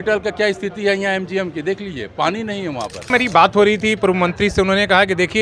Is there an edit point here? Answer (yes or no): yes